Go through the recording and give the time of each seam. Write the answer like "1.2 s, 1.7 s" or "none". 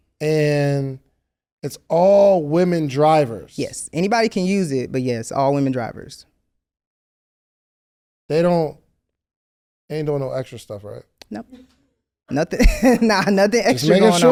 none